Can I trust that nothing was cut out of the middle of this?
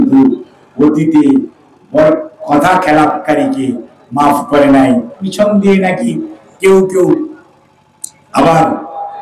no; 1 cut; at 5.2 s

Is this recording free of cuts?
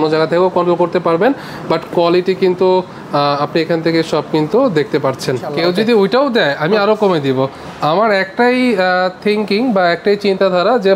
no; 1 cut; at 5.5 s

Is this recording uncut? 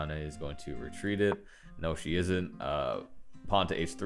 yes; 0 cuts

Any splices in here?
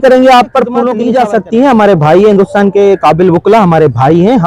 yes; 1 cut; at 1.0 s

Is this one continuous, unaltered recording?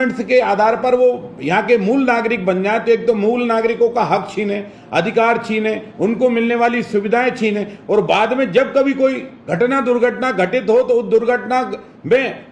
yes; 0 cuts

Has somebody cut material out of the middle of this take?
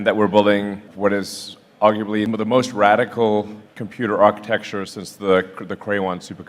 yes; 2 cuts; at 0.9 s, 2.3 s

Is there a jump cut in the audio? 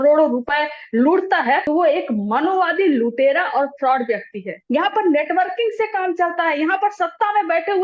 yes; 2 cuts; at 1.6 s, 4.5 s

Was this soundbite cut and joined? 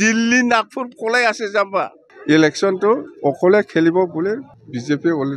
yes; 1 cut; at 2.1 s

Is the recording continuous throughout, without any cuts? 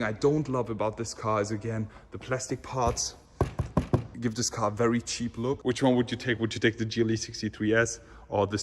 no; 2 cuts; at 4.1 s, 5.6 s

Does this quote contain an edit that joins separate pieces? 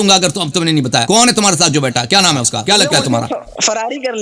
yes; 2 cuts; at 1.0 s, 2.6 s

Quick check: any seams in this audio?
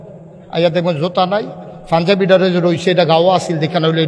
no; 0 cuts

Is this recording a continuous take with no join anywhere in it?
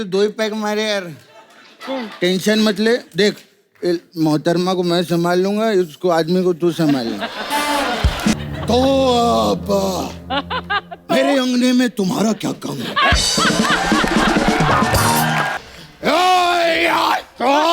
no; 2 cuts; at 8.3 s, 15.5 s

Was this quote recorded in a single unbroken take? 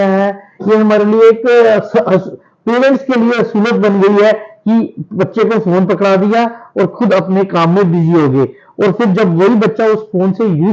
yes; 0 cuts

